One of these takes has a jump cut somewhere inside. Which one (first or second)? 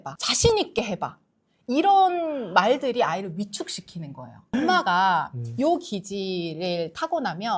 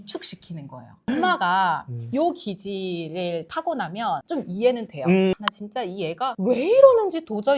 second